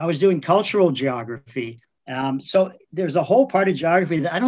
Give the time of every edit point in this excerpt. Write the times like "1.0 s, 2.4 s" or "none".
none